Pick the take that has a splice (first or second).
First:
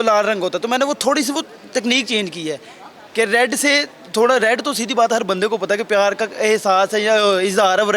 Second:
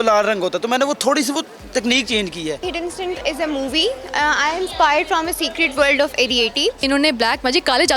second